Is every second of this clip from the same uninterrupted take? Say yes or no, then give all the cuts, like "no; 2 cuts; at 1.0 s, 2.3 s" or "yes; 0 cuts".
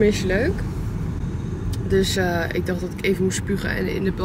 yes; 0 cuts